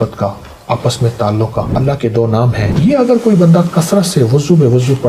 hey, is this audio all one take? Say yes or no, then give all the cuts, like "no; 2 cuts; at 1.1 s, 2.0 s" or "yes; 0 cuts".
no; 2 cuts; at 1.7 s, 2.7 s